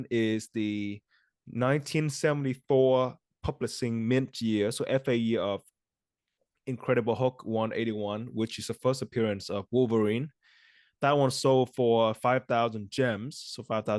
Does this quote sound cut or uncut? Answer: uncut